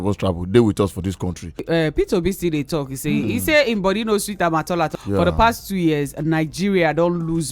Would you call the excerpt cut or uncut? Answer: cut